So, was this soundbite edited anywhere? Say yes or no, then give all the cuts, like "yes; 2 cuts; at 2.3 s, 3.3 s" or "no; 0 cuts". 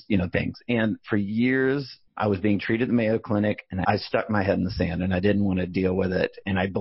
yes; 1 cut; at 3.7 s